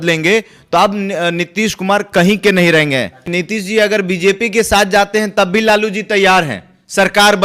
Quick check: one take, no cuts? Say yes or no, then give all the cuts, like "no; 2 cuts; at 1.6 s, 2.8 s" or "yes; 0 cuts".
no; 1 cut; at 3.2 s